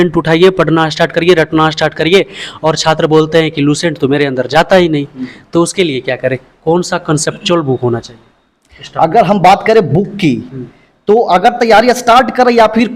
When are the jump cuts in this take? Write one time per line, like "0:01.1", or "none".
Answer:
none